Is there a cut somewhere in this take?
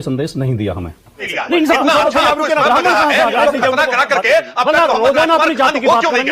yes; 1 cut; at 1.3 s

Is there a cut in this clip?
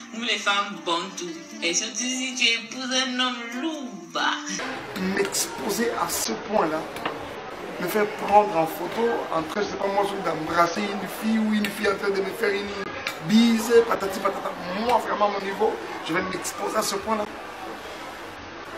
yes; 1 cut; at 4.6 s

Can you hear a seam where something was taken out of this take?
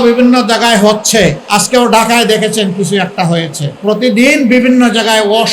yes; 2 cuts; at 1.4 s, 3.6 s

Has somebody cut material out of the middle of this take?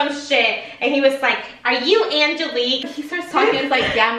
yes; 1 cut; at 2.8 s

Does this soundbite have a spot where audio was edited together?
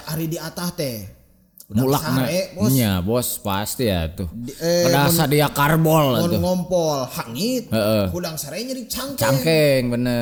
no; 0 cuts

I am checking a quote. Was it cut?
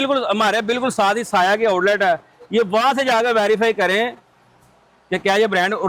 no; 0 cuts

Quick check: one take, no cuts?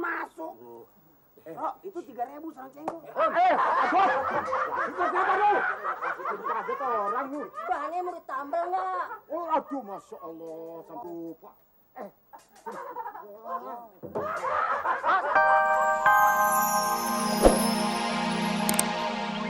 no; 1 cut; at 15.3 s

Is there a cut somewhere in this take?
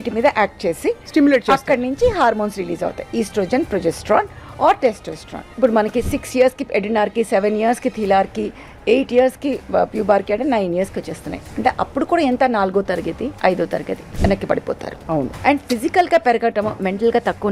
yes; 4 cuts; at 5.5 s, 13.4 s, 14.0 s, 15.3 s

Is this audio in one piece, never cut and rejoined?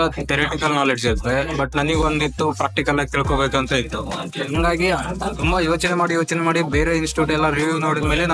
yes; 0 cuts

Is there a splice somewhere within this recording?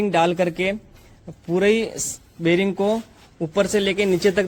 no; 0 cuts

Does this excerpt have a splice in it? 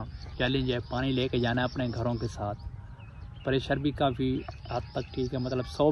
no; 0 cuts

